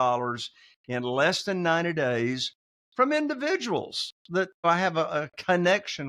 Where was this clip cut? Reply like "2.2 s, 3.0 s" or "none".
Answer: 4.7 s